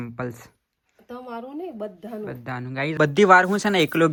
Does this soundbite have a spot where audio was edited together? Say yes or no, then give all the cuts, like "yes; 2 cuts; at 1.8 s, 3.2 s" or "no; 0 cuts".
no; 0 cuts